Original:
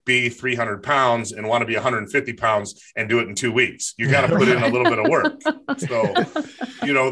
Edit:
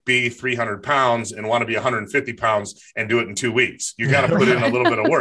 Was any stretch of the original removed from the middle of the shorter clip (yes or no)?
no